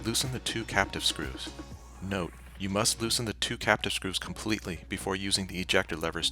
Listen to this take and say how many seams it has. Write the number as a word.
one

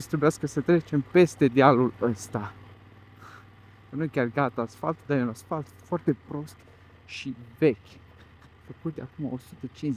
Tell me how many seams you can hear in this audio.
zero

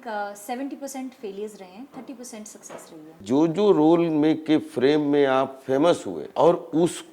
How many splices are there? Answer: two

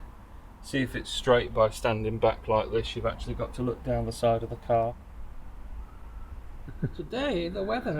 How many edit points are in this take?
two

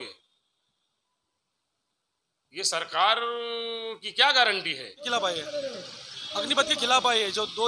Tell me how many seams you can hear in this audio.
one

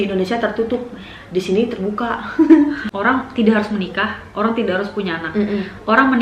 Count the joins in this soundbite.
one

